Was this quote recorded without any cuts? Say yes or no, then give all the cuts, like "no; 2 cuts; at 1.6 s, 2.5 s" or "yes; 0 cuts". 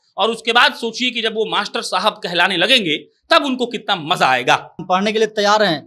no; 1 cut; at 4.8 s